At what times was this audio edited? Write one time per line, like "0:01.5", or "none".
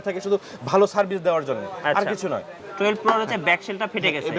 0:02.6